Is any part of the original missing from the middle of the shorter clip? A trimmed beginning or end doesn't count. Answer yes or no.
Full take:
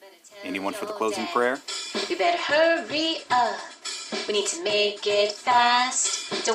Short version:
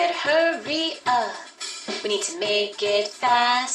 no